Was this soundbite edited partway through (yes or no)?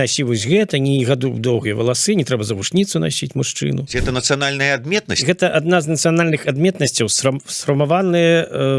yes